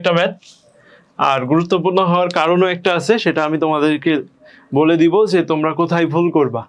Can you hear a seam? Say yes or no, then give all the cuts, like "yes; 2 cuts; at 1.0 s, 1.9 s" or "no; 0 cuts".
no; 0 cuts